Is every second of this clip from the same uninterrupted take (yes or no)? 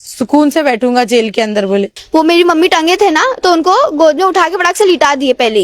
no